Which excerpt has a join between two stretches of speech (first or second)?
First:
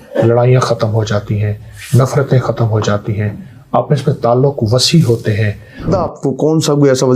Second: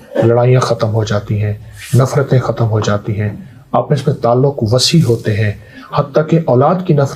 first